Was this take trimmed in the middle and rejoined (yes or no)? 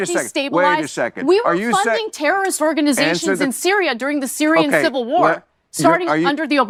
no